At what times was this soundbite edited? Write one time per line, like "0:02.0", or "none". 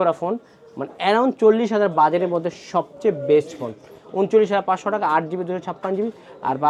none

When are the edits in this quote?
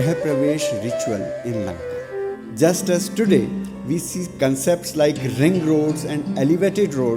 0:02.5

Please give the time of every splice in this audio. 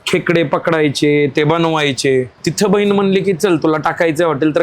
0:02.4

